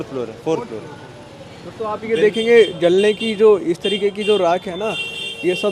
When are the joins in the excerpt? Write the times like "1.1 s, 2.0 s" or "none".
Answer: none